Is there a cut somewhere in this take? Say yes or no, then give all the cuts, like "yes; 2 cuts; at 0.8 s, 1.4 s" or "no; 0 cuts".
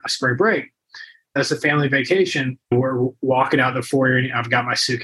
yes; 2 cuts; at 1.3 s, 2.6 s